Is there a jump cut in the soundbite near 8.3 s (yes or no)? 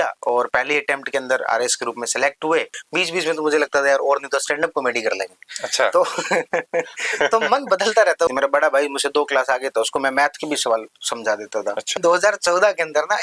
yes